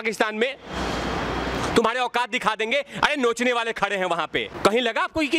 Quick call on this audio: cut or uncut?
cut